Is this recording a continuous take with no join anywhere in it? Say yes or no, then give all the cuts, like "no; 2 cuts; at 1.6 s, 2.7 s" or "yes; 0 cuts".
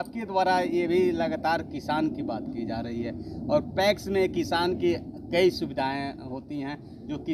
yes; 0 cuts